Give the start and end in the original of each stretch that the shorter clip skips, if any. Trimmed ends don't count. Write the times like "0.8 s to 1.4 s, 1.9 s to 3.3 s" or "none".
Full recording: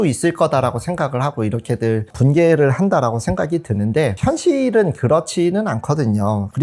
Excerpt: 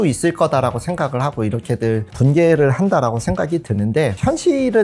none